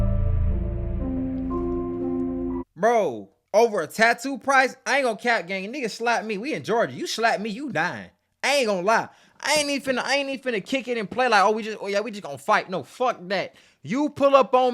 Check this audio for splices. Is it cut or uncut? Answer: cut